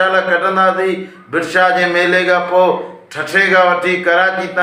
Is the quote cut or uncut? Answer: uncut